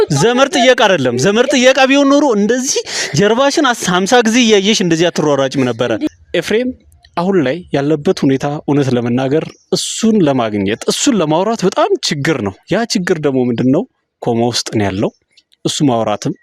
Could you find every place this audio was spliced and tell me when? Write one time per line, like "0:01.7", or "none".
0:06.1